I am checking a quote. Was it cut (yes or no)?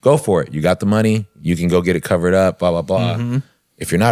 no